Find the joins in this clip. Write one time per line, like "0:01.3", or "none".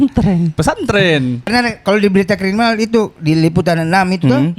0:01.5